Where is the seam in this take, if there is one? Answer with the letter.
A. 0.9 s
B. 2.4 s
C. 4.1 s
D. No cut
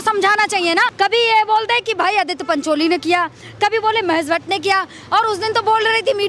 A